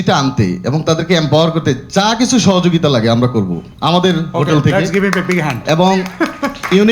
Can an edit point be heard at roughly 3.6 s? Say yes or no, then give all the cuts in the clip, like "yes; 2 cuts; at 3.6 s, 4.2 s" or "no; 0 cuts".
yes; 1 cut; at 3.6 s